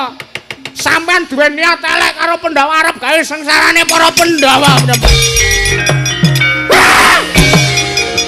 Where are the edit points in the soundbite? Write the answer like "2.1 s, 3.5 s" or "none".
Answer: 5.7 s